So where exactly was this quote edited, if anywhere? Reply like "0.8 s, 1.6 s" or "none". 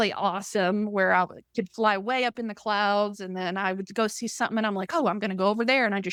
none